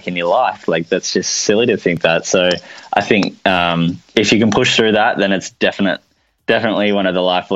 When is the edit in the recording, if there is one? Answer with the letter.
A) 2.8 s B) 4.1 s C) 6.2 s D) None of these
B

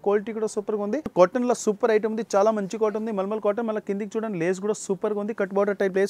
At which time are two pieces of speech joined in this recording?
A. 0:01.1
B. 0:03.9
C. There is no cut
A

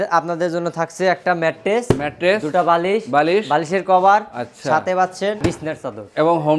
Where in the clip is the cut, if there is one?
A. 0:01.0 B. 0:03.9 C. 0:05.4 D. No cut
C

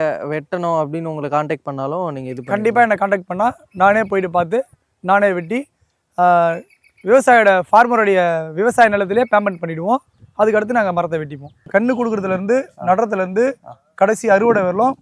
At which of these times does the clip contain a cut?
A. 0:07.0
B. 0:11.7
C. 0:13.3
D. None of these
B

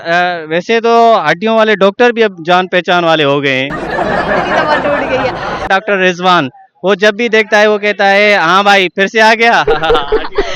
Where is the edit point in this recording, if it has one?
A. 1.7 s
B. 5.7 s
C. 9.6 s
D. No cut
B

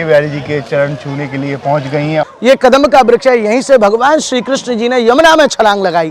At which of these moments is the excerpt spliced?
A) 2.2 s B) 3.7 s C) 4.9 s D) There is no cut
A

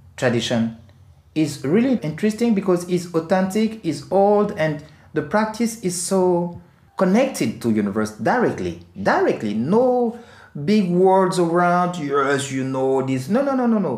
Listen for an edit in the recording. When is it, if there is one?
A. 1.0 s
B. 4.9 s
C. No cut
C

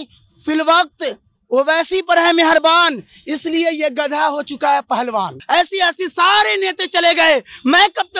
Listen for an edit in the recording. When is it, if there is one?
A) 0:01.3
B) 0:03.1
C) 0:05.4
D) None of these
C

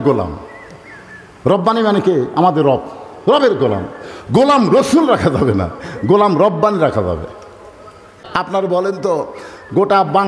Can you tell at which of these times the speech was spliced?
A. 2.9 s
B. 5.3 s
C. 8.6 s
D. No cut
C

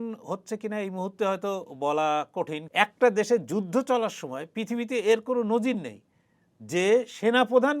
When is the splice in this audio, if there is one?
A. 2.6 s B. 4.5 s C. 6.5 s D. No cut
A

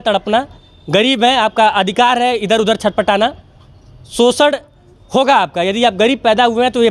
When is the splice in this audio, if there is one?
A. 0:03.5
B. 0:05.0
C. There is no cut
C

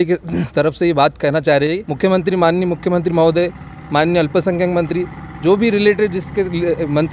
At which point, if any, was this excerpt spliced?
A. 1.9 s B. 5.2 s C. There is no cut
A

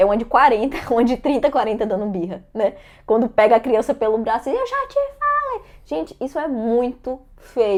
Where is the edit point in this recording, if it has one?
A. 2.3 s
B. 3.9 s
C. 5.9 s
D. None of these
D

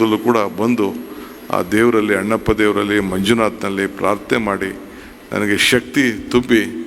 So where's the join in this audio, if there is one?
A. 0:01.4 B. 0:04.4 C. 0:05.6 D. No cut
D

